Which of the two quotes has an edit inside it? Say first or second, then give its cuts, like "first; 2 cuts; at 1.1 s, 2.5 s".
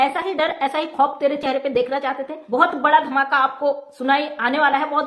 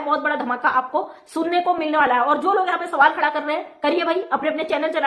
first; 1 cut; at 2.3 s